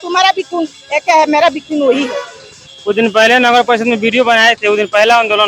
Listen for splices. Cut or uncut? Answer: uncut